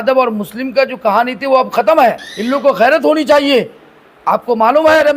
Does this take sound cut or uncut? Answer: cut